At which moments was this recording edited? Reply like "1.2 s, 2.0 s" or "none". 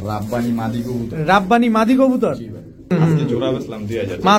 2.9 s